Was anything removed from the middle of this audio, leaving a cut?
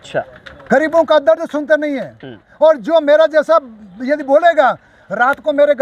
no; 0 cuts

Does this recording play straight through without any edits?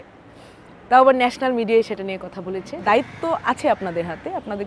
no; 1 cut; at 2.8 s

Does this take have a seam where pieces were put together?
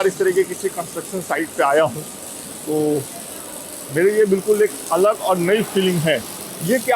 no; 0 cuts

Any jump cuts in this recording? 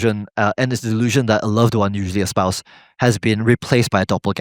no; 0 cuts

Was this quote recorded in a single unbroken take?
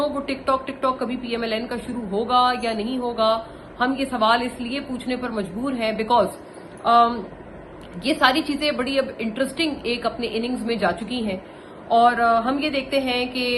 yes; 0 cuts

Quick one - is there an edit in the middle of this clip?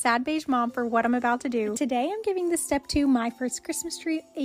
no; 0 cuts

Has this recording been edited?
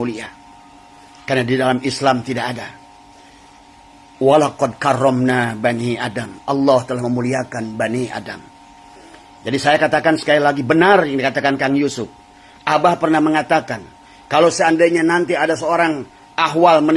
no; 0 cuts

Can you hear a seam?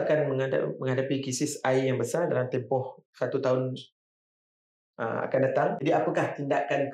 yes; 1 cut; at 5.8 s

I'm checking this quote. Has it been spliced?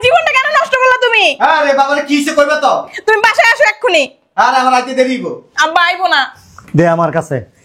no; 0 cuts

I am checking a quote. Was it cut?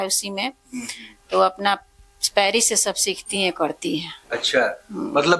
no; 0 cuts

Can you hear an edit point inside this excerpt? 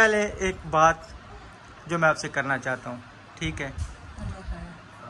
no; 0 cuts

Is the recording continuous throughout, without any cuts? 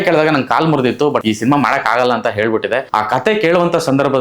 no; 2 cuts; at 1.2 s, 2.9 s

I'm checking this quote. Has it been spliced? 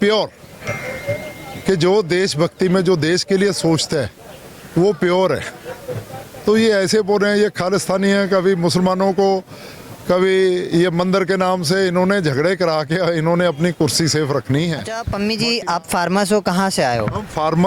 yes; 1 cut; at 15.0 s

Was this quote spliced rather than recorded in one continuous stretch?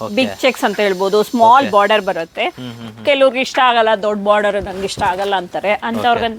no; 0 cuts

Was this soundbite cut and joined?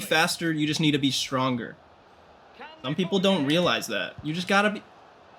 no; 0 cuts

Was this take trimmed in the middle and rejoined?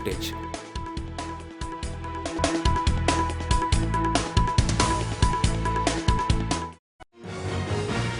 yes; 1 cut; at 7.2 s

